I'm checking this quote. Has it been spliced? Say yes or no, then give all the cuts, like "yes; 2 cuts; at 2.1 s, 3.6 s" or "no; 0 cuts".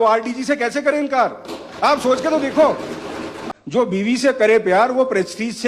yes; 1 cut; at 3.4 s